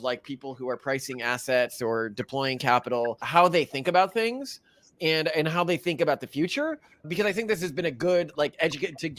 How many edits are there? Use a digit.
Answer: 1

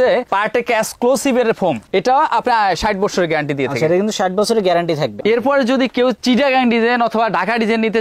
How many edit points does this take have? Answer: 2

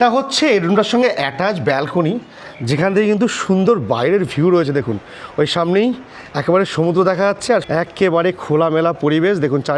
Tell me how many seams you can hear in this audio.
1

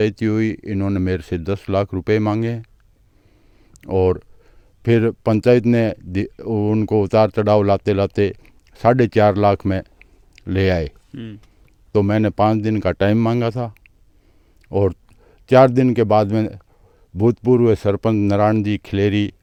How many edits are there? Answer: 0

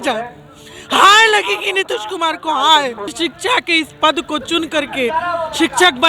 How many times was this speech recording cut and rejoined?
1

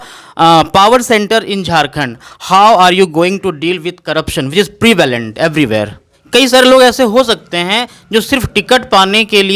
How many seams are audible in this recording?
1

